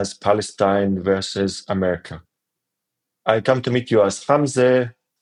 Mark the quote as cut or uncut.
uncut